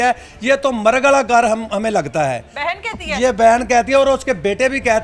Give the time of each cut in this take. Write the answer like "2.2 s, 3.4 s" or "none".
none